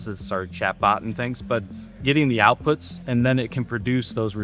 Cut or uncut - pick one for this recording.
cut